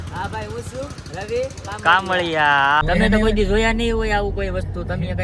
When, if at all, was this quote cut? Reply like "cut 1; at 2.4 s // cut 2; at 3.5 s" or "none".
cut 1; at 2.8 s